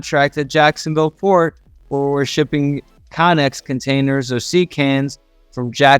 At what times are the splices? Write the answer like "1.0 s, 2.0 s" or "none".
none